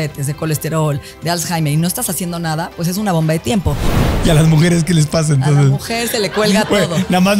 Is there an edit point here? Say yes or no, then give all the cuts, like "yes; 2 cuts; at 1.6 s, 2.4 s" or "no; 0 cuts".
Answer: yes; 1 cut; at 4.1 s